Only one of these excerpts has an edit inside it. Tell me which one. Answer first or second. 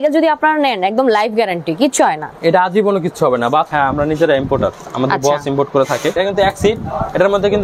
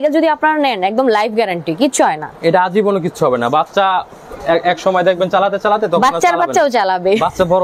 first